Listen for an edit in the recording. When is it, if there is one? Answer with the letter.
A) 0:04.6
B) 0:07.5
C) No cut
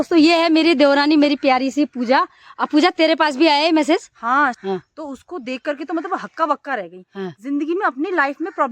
A